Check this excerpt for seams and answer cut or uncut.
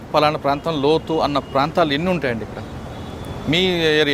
uncut